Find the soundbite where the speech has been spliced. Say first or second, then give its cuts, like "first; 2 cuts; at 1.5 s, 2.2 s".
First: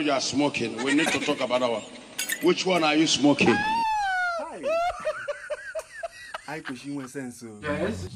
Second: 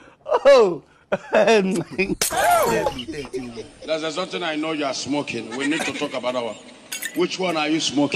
second; 1 cut; at 2.2 s